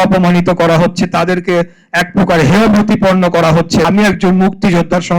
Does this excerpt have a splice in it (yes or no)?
yes